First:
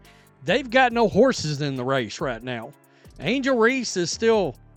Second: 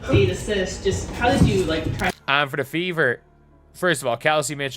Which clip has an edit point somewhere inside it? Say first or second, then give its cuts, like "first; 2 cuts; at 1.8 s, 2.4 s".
second; 1 cut; at 2.2 s